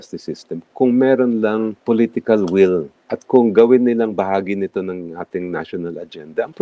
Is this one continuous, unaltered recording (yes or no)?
no